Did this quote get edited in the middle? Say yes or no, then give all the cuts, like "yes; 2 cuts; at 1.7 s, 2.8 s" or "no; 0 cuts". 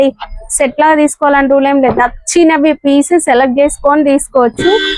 no; 0 cuts